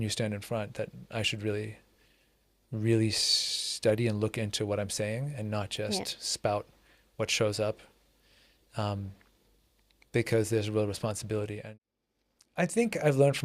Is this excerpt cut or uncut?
cut